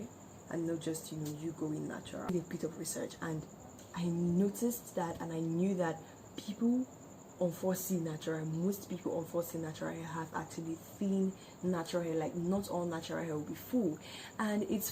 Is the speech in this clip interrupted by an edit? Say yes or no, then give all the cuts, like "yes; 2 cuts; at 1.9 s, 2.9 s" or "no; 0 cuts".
yes; 1 cut; at 2.3 s